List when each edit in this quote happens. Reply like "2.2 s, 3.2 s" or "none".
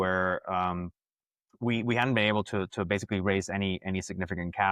none